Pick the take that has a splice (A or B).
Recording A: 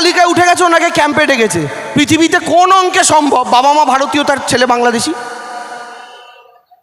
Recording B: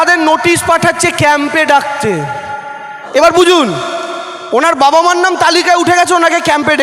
B